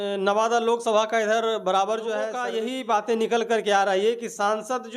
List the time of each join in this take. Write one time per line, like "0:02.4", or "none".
0:02.4